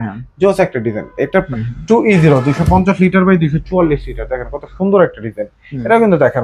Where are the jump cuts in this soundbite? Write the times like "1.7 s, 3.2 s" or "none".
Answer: 1.5 s